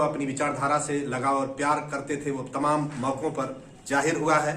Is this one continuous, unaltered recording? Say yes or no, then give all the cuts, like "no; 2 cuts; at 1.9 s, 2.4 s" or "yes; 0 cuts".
yes; 0 cuts